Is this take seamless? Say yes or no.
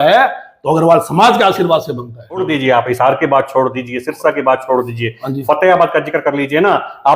no